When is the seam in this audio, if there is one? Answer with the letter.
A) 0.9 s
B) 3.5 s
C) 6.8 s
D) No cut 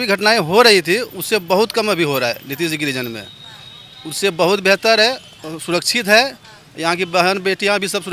D